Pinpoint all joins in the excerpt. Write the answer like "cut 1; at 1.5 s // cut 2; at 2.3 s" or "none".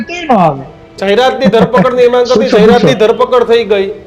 cut 1; at 0.9 s